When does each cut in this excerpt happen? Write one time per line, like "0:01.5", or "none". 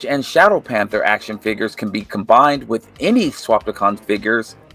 none